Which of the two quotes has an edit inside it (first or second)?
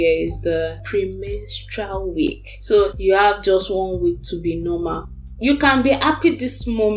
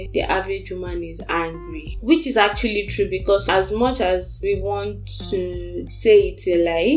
first